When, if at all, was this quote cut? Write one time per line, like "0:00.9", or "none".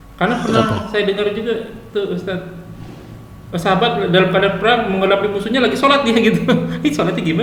none

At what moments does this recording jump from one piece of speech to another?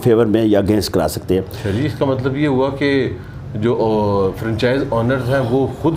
none

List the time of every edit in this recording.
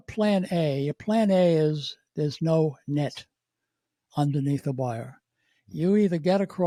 none

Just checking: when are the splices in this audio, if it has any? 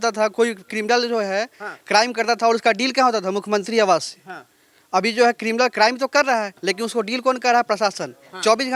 none

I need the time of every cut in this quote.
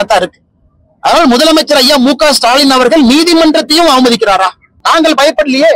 0:04.8

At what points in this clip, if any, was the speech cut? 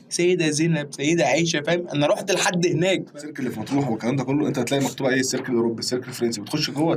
0:03.4

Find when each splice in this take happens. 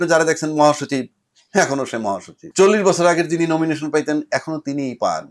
0:02.3

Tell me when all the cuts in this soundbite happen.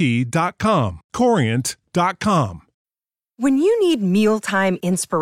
0:02.7

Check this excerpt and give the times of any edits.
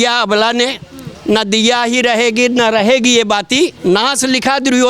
0:03.8

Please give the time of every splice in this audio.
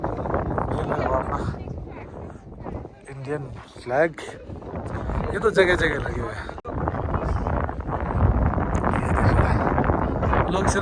none

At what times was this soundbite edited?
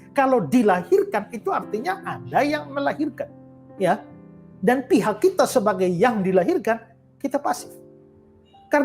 none

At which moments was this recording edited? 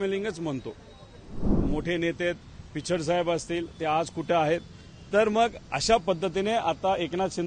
0:01.5

